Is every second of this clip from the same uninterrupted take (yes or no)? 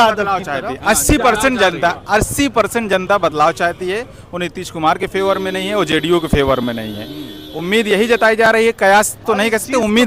yes